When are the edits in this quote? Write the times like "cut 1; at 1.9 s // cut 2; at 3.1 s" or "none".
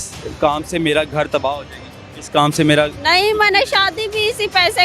none